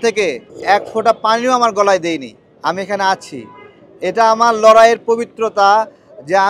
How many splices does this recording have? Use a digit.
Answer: 0